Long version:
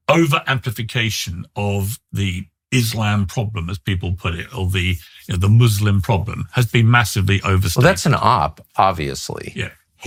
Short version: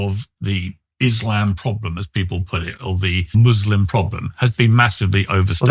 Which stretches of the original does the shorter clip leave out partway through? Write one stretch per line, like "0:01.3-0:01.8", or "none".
0:05.1-0:05.5